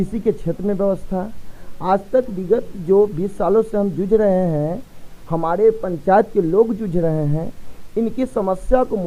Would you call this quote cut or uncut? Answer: uncut